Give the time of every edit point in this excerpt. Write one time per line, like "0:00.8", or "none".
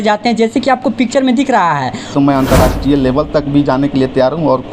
0:02.1